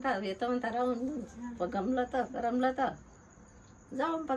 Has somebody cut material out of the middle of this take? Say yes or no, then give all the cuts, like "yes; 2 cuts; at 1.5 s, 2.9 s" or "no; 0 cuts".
no; 0 cuts